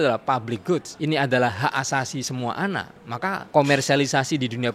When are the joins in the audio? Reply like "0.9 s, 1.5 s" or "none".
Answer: 0.9 s, 3.4 s

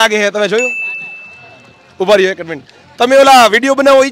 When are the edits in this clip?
none

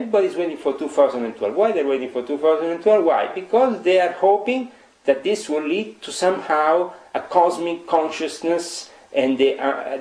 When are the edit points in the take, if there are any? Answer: none

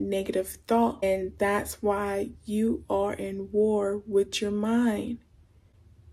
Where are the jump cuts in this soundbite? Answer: 1.0 s

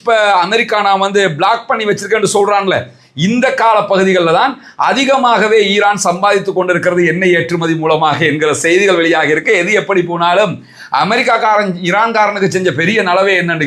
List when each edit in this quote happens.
none

